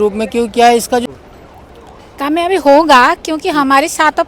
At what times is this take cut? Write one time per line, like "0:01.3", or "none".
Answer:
0:01.1